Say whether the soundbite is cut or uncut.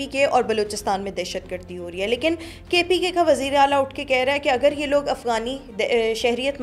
uncut